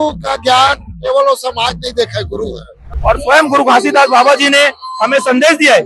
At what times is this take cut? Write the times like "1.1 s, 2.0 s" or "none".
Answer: 2.9 s